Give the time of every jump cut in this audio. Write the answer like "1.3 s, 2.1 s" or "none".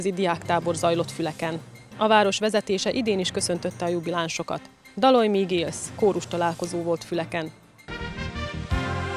7.6 s